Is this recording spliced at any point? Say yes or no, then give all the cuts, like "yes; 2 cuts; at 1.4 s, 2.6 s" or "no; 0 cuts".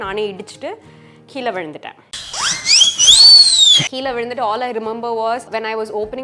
no; 0 cuts